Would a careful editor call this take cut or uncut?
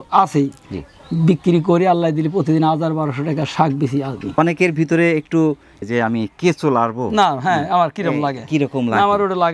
cut